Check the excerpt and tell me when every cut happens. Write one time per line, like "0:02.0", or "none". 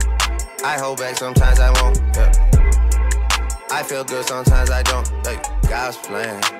0:05.7